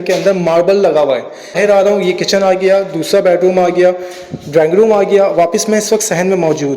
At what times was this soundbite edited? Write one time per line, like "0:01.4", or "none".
0:01.6

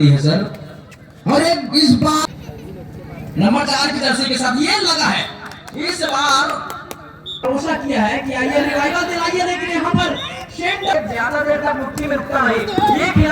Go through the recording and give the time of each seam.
0:02.2
0:07.4
0:10.9

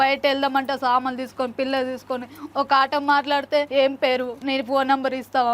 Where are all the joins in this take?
0:04.0

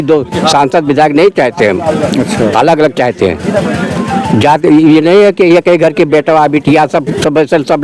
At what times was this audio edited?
none

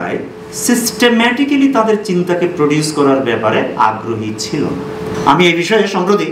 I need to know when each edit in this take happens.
none

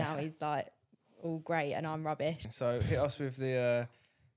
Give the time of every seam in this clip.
0:02.5

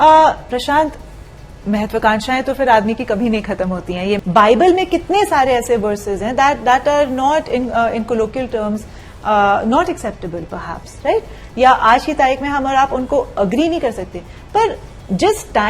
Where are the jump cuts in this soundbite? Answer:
0:04.2

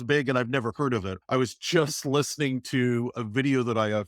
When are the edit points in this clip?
0:01.2

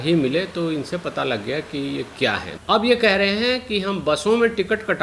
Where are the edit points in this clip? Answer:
0:02.5

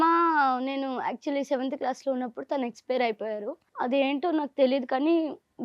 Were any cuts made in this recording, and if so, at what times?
0:03.6

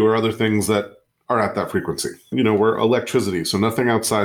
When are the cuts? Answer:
0:02.3

